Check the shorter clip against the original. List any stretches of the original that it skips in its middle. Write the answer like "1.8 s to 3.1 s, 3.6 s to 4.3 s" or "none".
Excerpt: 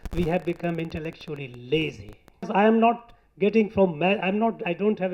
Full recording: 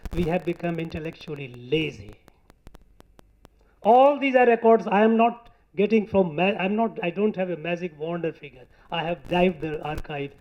2.5 s to 4.8 s